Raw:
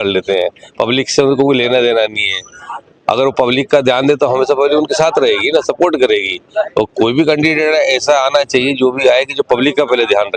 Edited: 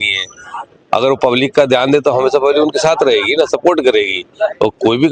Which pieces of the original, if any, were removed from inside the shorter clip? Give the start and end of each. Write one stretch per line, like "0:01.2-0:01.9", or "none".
none